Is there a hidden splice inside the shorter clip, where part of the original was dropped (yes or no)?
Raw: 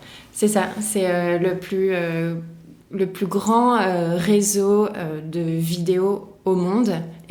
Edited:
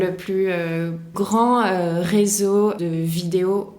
yes